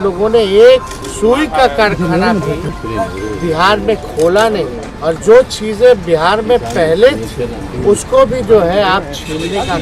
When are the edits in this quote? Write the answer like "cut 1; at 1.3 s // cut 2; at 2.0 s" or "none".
cut 1; at 1.0 s // cut 2; at 2.7 s // cut 3; at 4.8 s // cut 4; at 7.6 s